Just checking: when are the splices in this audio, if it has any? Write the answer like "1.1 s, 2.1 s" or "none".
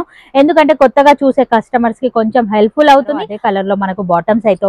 3.4 s